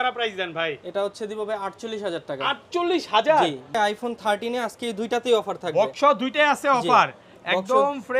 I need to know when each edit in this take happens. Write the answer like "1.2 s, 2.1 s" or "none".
3.7 s